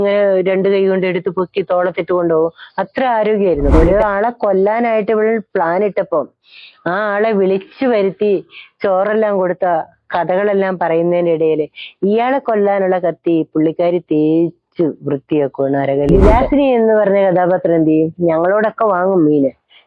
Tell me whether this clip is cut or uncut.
cut